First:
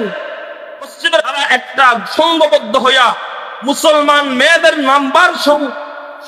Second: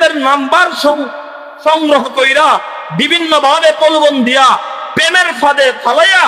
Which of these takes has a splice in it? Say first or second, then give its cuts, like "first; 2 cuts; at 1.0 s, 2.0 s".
first; 1 cut; at 1.2 s